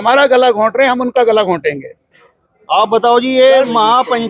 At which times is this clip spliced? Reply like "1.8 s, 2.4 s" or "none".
none